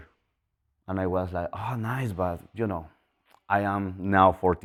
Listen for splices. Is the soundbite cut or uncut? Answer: uncut